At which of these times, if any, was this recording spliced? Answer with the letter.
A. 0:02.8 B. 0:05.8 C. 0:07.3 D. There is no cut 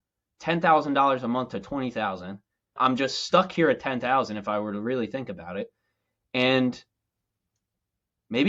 A